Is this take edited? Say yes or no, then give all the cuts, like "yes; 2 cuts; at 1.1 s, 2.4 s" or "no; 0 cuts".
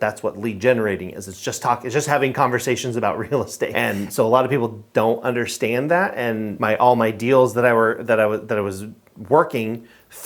yes; 2 cuts; at 3.7 s, 6.5 s